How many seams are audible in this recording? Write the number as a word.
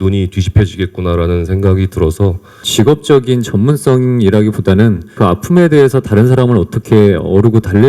two